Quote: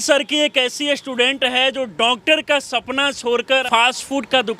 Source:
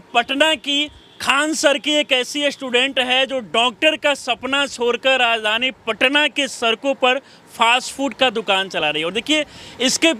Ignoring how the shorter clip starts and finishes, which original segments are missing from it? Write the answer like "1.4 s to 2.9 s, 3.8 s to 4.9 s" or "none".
5.2 s to 7.5 s